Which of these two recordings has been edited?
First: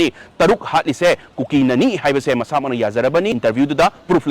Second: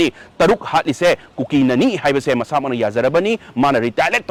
first; 1 cut; at 3.4 s

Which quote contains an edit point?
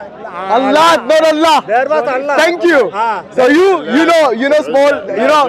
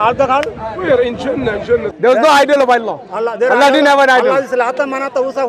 second; 1 cut; at 1.9 s

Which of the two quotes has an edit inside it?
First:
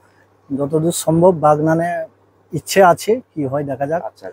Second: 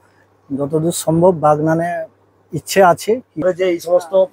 second; 1 cut; at 3.4 s

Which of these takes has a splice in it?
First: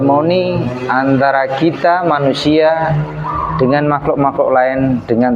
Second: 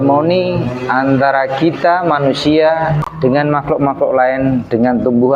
second; 1 cut; at 3.1 s

